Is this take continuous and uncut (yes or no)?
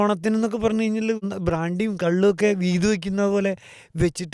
no